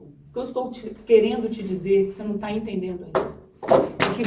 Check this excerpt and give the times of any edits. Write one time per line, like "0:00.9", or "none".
none